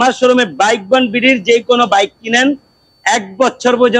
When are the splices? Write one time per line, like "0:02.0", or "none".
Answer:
none